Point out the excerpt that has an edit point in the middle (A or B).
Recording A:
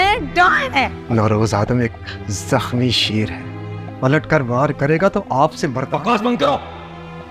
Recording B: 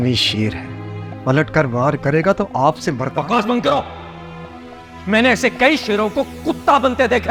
A